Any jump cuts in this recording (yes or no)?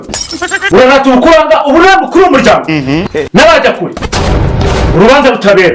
no